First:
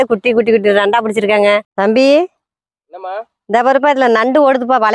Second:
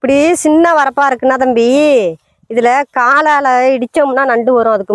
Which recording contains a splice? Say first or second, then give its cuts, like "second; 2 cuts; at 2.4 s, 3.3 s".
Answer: first; 1 cut; at 1.7 s